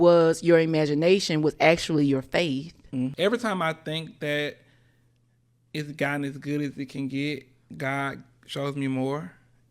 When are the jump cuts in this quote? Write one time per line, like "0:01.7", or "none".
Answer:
0:03.1